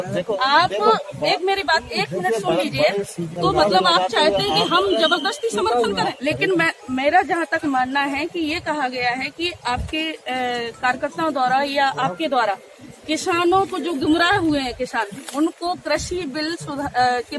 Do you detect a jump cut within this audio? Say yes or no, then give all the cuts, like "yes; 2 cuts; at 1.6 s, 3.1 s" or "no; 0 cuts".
yes; 2 cuts; at 3.3 s, 6.2 s